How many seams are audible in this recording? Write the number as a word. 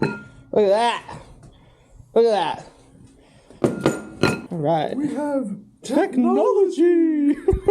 one